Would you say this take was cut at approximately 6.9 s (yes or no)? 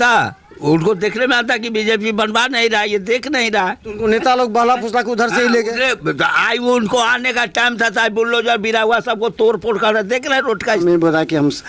no